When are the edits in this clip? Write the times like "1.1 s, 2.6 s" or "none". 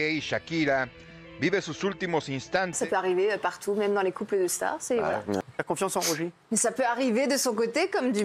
2.8 s, 5.4 s